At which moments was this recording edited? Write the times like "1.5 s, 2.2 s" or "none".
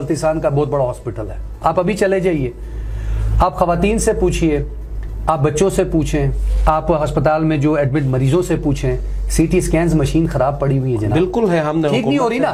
none